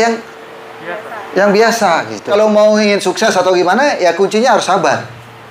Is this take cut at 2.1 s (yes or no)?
yes